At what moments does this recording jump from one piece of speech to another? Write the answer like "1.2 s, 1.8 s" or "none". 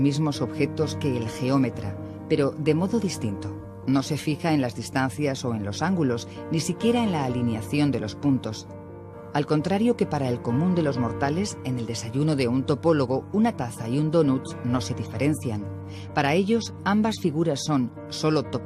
6.7 s